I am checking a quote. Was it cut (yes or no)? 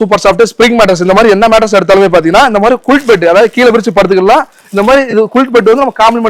no